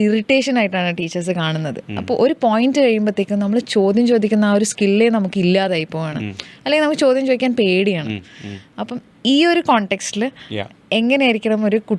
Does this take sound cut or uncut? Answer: uncut